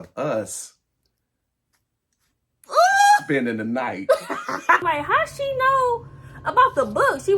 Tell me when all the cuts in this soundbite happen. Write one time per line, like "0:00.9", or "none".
0:04.8